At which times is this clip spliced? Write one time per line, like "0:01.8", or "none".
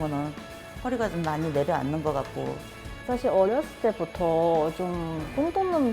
0:03.0